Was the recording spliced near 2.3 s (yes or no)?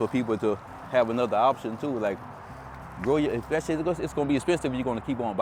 no